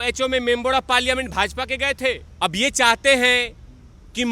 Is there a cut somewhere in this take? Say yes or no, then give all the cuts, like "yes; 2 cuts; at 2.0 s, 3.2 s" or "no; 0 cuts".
yes; 1 cut; at 2.3 s